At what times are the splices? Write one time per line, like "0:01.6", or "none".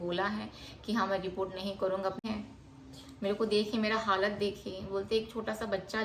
0:02.2